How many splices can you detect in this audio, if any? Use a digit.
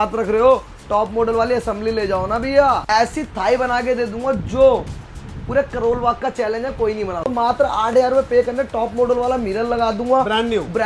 2